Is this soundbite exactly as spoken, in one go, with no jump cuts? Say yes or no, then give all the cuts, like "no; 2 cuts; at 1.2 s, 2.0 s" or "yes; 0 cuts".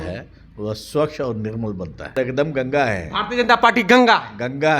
no; 1 cut; at 2.1 s